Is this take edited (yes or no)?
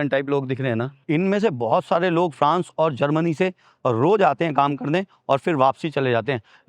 no